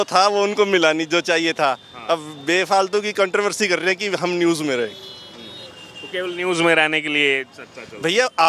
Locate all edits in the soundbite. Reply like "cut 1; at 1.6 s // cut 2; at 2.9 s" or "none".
none